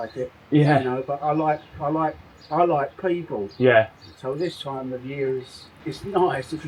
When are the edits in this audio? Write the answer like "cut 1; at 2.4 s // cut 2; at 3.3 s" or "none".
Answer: none